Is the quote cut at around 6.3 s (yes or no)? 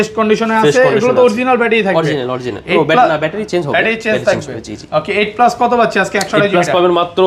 no